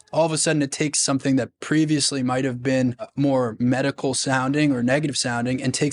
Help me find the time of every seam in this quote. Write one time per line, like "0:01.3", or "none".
0:03.1

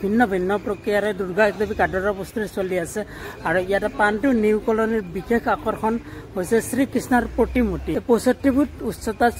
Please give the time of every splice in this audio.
0:07.8

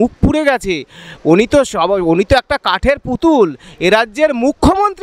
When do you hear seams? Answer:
none

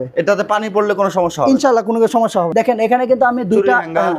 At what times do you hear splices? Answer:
0:02.5

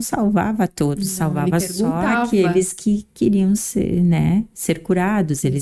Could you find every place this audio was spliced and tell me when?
none

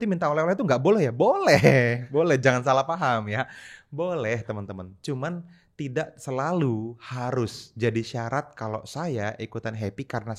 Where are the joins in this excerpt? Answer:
none

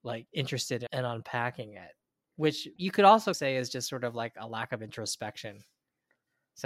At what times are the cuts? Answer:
0:00.9
0:02.8

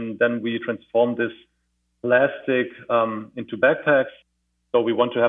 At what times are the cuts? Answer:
0:04.3

